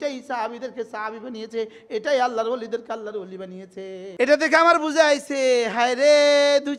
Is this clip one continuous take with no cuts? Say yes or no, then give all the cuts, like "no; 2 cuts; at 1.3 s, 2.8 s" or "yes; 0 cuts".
no; 1 cut; at 4.1 s